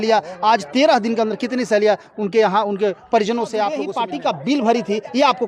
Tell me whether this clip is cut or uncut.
cut